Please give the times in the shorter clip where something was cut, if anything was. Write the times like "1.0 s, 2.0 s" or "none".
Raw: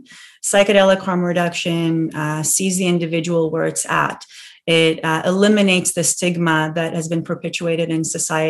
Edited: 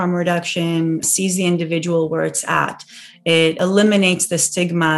1.1 s, 3.6 s